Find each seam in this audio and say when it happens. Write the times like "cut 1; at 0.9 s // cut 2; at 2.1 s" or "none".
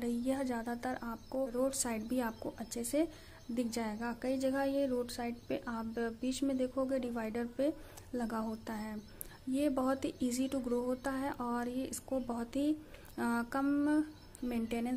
cut 1; at 1.5 s